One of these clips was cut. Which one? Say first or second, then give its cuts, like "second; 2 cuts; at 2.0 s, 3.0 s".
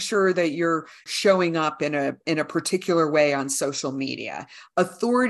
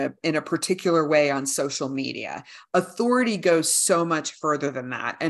first; 1 cut; at 1.1 s